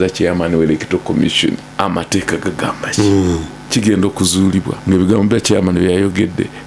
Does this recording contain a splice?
yes; 3 cuts; at 1.7 s, 3.5 s, 4.7 s

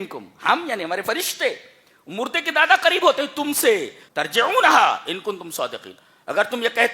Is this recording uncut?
no; 1 cut; at 4.0 s

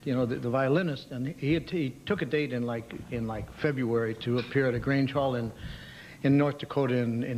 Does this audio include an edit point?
no; 0 cuts

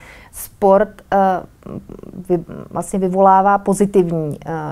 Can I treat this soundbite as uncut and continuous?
yes; 0 cuts

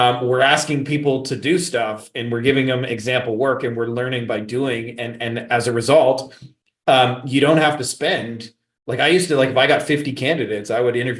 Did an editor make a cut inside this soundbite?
no; 0 cuts

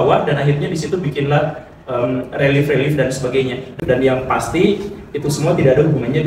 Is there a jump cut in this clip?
yes; 1 cut; at 3.8 s

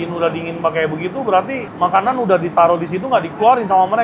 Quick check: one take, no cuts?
no; 1 cut; at 1.7 s

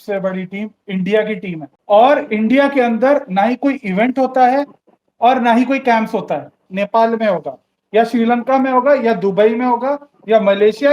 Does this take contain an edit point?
yes; 2 cuts; at 1.7 s, 6.6 s

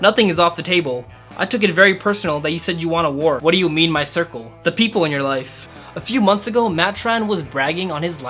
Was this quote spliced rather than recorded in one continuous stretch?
yes; 2 cuts; at 3.4 s, 5.7 s

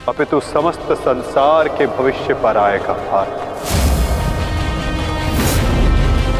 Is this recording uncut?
yes; 0 cuts

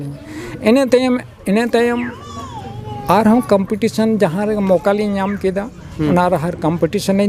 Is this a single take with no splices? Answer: yes; 0 cuts

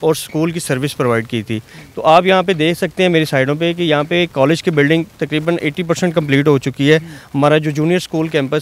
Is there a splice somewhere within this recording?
no; 0 cuts

